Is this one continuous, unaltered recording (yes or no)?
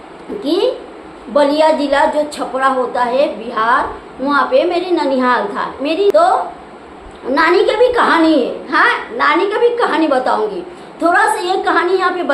no